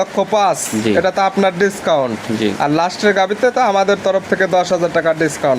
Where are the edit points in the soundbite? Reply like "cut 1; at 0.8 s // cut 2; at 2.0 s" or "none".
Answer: none